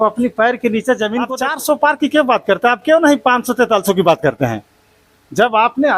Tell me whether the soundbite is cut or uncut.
cut